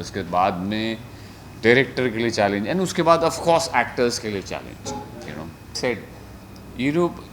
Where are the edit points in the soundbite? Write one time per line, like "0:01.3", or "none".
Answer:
0:05.8